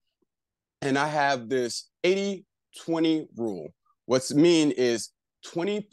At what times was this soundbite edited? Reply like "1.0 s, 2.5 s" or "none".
none